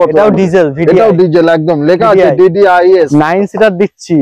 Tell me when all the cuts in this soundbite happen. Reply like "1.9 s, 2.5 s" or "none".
3.1 s

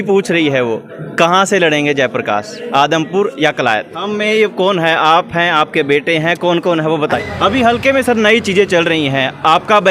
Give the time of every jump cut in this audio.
4.0 s, 7.2 s

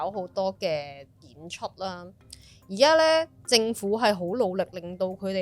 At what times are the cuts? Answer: none

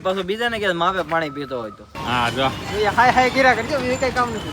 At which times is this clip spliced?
1.9 s

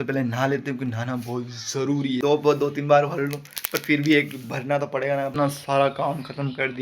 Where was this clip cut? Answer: 2.2 s, 5.3 s

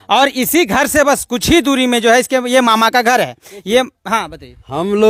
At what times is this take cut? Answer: none

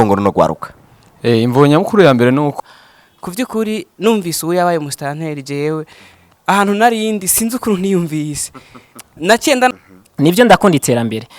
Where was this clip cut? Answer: 2.6 s, 9.7 s

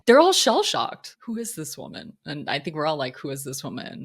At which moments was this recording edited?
1.0 s

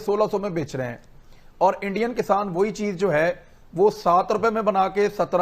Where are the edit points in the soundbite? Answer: none

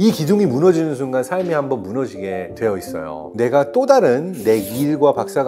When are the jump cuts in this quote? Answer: 3.2 s

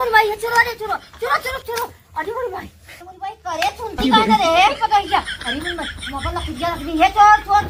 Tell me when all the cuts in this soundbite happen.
none

